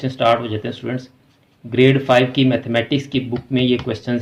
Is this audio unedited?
yes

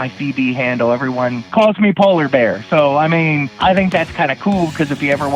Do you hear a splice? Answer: yes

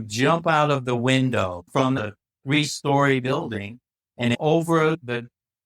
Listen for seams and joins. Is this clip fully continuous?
no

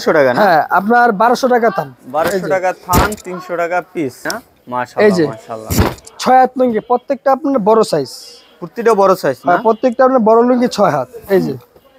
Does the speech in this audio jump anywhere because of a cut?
yes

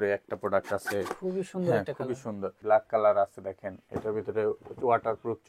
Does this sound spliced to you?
yes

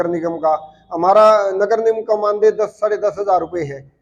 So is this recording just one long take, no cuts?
yes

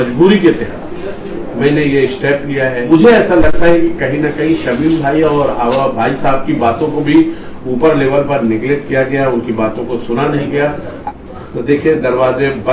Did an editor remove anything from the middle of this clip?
yes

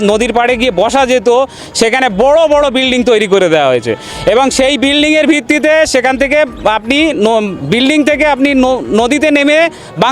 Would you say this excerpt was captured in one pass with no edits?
yes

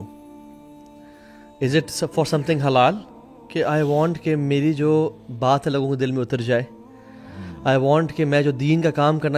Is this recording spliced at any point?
no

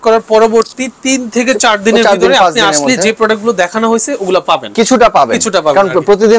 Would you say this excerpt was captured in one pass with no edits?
yes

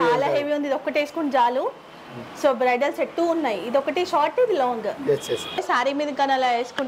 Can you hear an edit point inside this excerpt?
yes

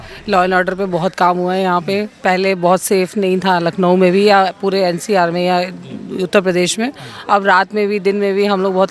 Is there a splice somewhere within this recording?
no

